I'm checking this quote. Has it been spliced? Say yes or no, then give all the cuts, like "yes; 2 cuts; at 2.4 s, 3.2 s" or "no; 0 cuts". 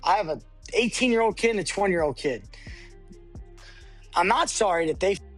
no; 0 cuts